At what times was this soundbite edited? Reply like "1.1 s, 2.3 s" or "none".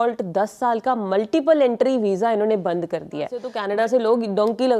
3.6 s

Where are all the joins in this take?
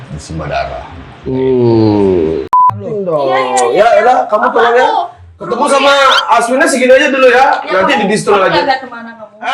2.7 s

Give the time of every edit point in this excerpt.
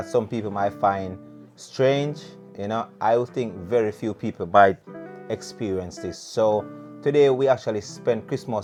none

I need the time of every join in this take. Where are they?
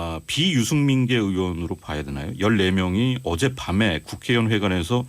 2.9 s

